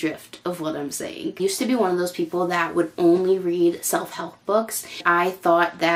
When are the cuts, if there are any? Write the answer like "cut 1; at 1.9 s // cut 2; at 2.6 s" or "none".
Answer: none